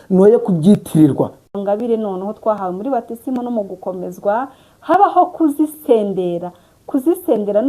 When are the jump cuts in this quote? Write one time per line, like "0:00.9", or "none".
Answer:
0:01.5